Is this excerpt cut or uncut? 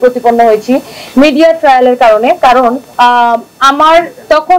uncut